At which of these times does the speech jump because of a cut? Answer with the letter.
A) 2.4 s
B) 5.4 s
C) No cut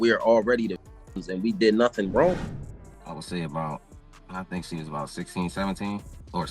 A